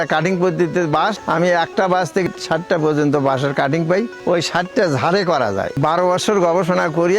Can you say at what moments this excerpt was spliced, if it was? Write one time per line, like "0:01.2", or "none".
0:01.2
0:02.2
0:04.1
0:05.8